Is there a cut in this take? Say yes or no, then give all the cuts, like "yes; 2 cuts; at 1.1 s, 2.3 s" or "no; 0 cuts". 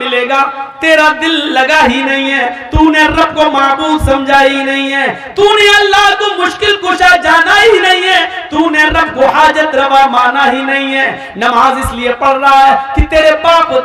no; 0 cuts